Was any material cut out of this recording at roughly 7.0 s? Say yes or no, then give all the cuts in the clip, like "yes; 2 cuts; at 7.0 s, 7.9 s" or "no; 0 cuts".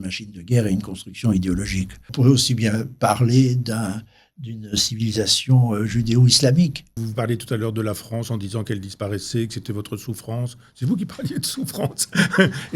yes; 2 cuts; at 2.1 s, 7.0 s